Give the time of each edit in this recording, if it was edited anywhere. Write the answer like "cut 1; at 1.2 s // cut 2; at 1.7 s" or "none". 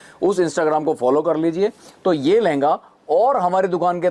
none